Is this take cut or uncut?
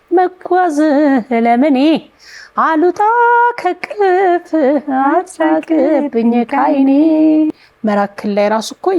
cut